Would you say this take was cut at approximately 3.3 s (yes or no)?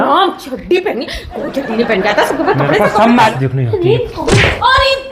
yes